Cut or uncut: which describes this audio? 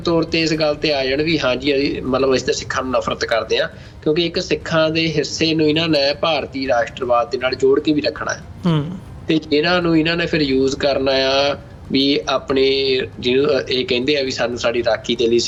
uncut